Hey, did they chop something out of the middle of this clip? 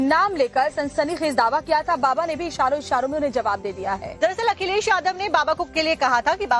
yes; 1 cut; at 3.4 s

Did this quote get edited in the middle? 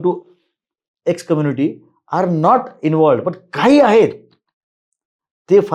no; 0 cuts

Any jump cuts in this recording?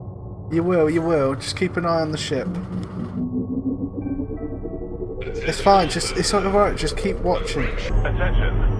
yes; 1 cut; at 7.9 s

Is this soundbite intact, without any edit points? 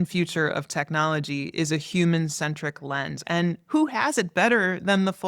no; 1 cut; at 3.1 s

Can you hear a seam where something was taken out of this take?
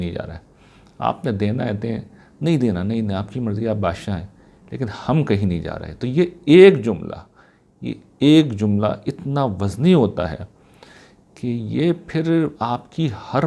no; 0 cuts

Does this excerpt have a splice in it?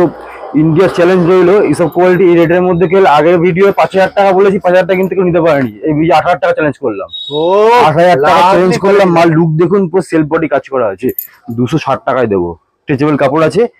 no; 0 cuts

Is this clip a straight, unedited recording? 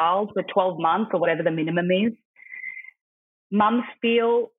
yes; 0 cuts

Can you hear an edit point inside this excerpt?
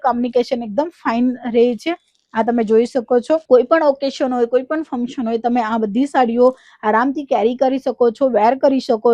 no; 0 cuts

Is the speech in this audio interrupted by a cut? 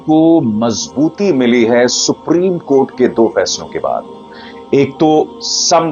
no; 0 cuts

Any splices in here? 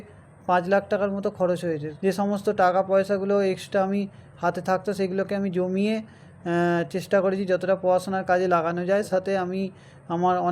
yes; 2 cuts; at 1.9 s, 9.1 s

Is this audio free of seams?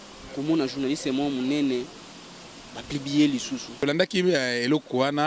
no; 1 cut; at 3.8 s

